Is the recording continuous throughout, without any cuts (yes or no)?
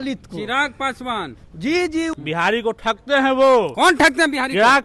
no